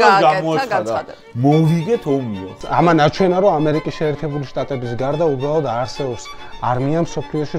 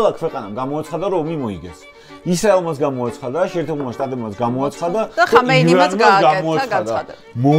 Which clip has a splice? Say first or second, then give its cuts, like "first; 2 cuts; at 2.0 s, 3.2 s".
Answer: first; 1 cut; at 2.5 s